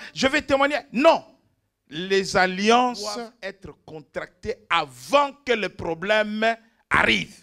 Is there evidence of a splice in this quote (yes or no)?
yes